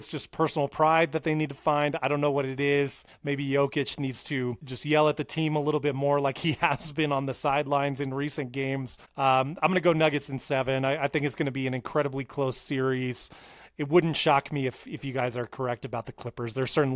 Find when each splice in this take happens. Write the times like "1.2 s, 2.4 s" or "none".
3.1 s, 4.7 s, 9.0 s